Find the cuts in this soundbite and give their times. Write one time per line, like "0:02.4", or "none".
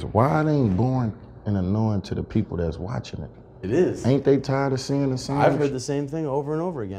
none